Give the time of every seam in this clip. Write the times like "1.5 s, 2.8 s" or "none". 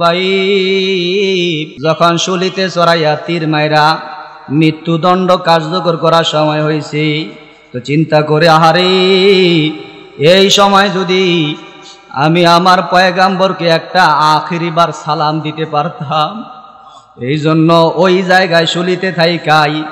1.7 s